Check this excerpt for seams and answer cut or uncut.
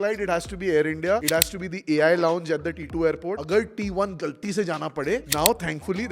cut